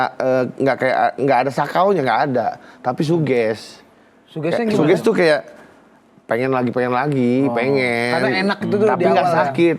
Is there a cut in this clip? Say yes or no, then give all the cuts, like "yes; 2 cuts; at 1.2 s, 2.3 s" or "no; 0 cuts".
no; 0 cuts